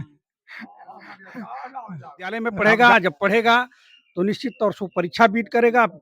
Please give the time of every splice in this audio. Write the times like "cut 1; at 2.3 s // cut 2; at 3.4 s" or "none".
cut 1; at 2.4 s

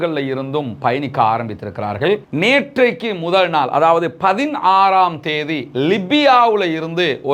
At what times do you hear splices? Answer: cut 1; at 2.2 s

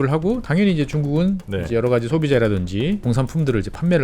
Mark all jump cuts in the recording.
cut 1; at 3.0 s

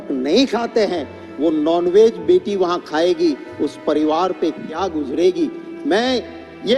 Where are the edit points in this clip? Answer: none

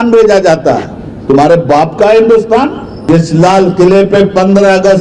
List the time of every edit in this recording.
cut 1; at 3.1 s

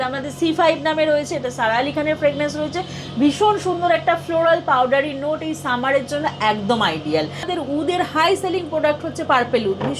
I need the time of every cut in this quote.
cut 1; at 7.5 s

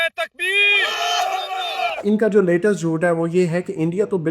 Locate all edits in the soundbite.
cut 1; at 2.0 s

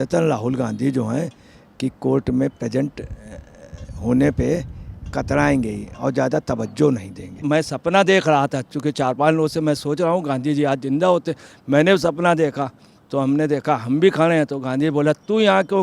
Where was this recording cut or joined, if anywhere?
cut 1; at 7.4 s

